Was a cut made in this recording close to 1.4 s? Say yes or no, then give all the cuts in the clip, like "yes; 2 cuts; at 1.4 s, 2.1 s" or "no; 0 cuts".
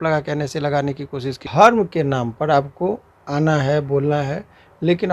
yes; 1 cut; at 1.4 s